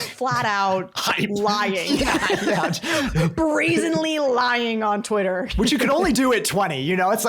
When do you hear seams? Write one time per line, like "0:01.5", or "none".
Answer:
0:05.5